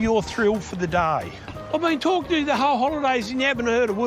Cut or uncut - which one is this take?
cut